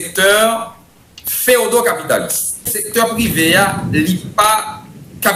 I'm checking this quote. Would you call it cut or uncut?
cut